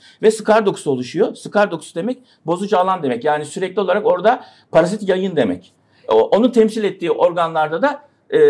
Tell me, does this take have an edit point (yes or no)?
no